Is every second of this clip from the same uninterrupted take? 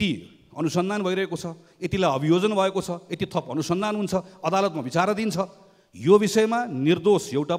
yes; 0 cuts

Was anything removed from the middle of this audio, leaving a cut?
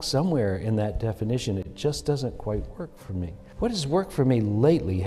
yes; 1 cut; at 3.4 s

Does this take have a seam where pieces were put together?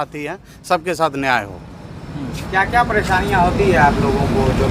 no; 0 cuts

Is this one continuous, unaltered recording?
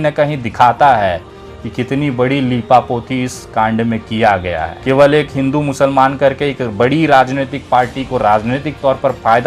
no; 1 cut; at 4.7 s

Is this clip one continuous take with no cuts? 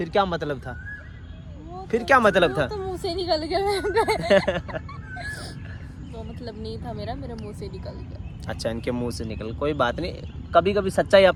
yes; 0 cuts

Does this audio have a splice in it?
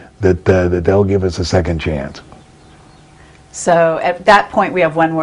no; 0 cuts

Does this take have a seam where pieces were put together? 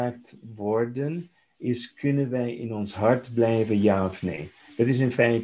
no; 0 cuts

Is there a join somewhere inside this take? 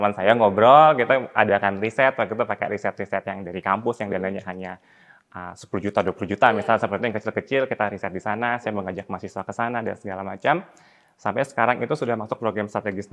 no; 0 cuts

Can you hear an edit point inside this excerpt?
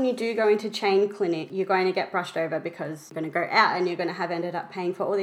yes; 2 cuts; at 1.5 s, 3.1 s

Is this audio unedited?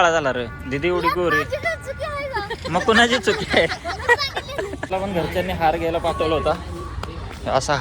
no; 2 cuts; at 2.6 s, 4.9 s

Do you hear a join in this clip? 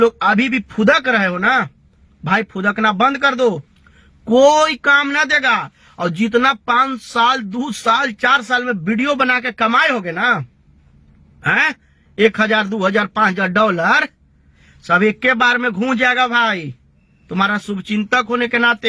no; 0 cuts

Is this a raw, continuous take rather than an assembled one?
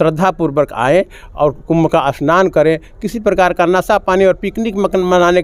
yes; 0 cuts

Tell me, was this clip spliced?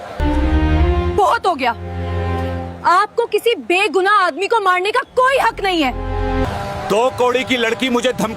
yes; 1 cut; at 6.5 s

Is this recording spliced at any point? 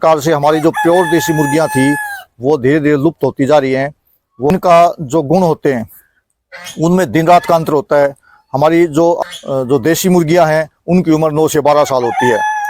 yes; 2 cuts; at 4.5 s, 9.2 s

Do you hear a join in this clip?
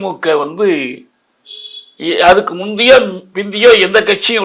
no; 0 cuts

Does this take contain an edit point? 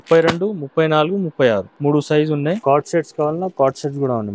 yes; 2 cuts; at 1.7 s, 2.6 s

